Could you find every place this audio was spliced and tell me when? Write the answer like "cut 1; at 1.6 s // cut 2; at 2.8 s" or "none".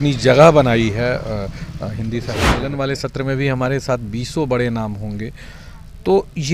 cut 1; at 2.5 s